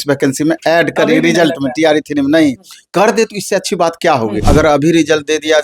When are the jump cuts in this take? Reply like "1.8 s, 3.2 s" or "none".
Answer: 4.4 s